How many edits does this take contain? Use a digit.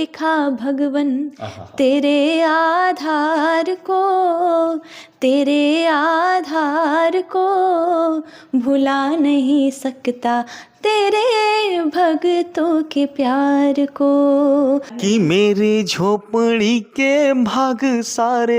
1